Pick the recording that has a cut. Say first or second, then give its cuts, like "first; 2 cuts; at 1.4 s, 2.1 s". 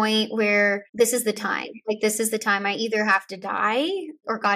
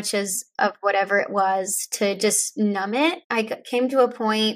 second; 1 cut; at 3.2 s